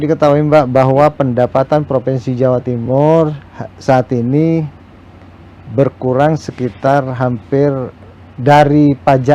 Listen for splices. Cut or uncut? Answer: uncut